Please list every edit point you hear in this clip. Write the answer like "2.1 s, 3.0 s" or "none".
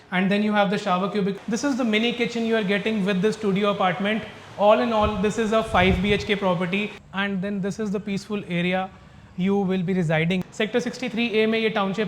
1.4 s, 7.0 s, 10.4 s

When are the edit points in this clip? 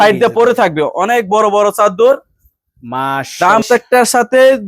3.6 s

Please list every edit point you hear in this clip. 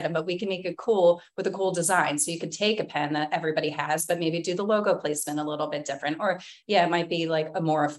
none

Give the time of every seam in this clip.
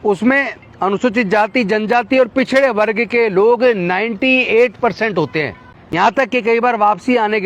none

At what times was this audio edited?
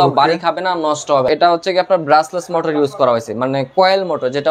1.3 s

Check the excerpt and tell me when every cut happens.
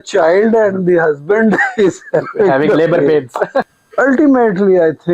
3.8 s

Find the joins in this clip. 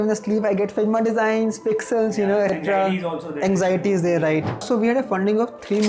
2.5 s, 4.5 s

